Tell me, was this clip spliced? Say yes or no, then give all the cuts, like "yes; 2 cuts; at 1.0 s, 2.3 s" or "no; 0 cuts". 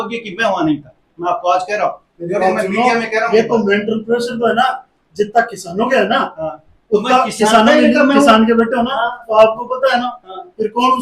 no; 0 cuts